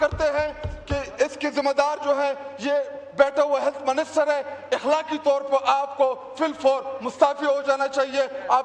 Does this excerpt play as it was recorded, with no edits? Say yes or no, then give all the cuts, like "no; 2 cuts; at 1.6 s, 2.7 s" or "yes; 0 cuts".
yes; 0 cuts